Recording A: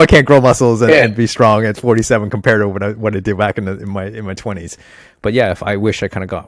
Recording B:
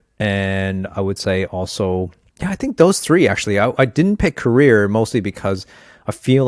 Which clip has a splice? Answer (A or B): B